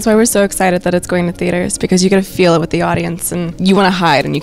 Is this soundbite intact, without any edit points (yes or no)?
no